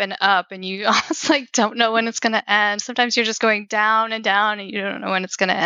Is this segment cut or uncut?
uncut